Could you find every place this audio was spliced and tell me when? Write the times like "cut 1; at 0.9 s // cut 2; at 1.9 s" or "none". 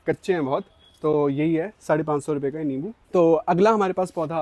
none